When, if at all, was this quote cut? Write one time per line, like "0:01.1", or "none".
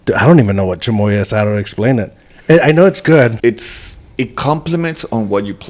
0:03.4